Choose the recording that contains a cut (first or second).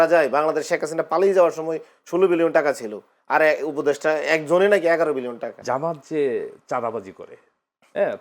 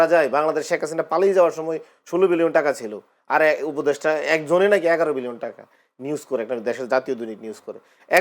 first